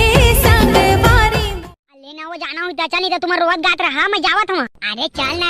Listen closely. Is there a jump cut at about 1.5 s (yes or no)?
yes